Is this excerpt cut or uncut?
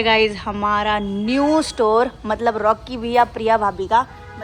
uncut